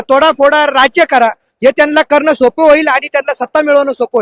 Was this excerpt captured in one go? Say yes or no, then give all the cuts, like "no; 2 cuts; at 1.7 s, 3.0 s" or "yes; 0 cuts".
yes; 0 cuts